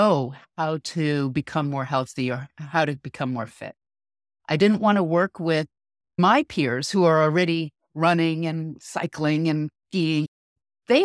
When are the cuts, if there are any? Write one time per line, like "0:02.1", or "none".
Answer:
0:06.1